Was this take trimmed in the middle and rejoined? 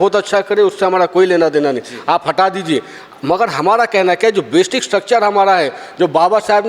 no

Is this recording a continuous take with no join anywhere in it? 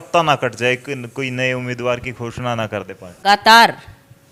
no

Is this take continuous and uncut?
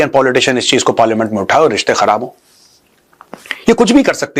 yes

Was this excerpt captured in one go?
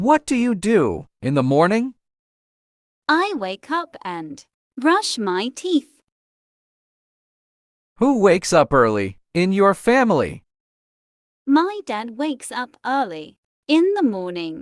no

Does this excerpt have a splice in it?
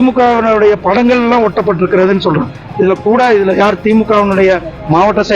yes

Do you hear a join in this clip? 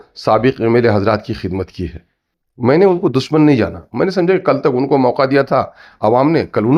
no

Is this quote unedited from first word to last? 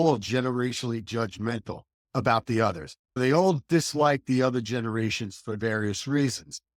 yes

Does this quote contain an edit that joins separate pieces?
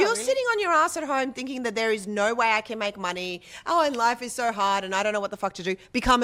no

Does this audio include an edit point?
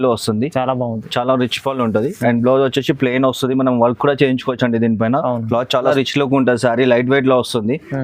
yes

